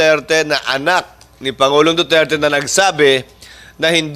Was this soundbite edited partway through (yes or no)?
no